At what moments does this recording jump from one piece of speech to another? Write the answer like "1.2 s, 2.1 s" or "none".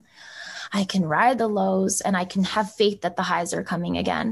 1.4 s